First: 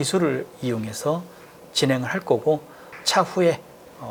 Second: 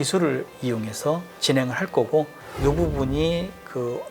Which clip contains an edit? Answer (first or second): second